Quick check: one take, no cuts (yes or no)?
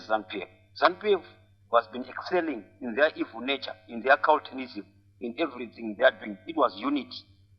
yes